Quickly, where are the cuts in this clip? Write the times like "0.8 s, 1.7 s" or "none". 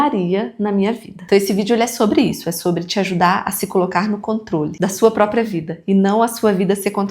1.1 s, 4.7 s